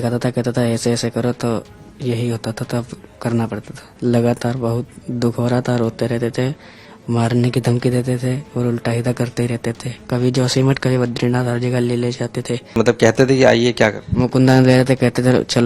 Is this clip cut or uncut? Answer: cut